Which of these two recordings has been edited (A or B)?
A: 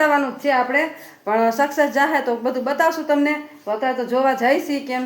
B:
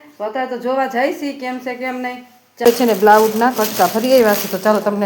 B